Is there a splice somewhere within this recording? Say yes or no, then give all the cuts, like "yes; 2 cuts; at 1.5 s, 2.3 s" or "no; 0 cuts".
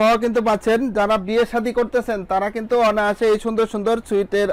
no; 0 cuts